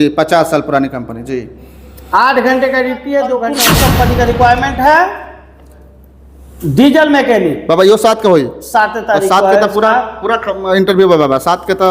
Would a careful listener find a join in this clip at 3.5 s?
yes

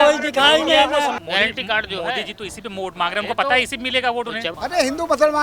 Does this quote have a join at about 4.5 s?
yes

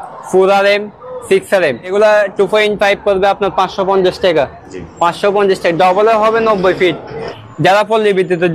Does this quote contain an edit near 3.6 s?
no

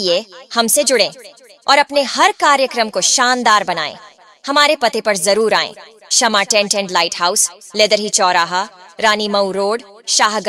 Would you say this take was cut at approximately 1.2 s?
yes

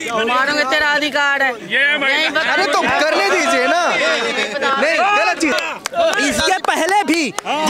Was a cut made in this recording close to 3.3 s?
no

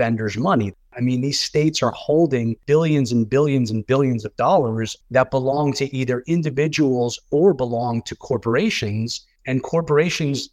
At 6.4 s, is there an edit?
no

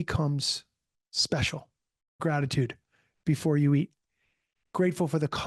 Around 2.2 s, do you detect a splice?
yes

